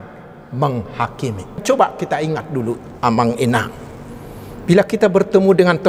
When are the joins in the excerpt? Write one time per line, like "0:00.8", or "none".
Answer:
0:01.6